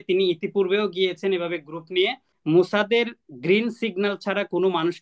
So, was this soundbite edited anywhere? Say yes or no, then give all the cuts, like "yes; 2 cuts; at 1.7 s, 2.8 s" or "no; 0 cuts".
yes; 1 cut; at 2.3 s